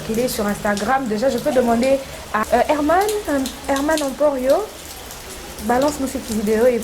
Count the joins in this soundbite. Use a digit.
1